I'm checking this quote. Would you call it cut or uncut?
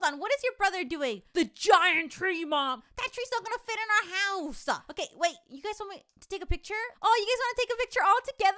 cut